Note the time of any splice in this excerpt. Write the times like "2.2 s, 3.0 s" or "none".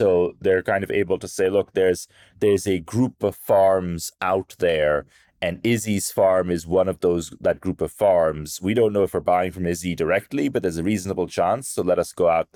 none